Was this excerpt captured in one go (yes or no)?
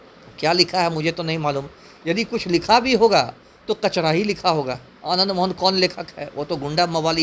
yes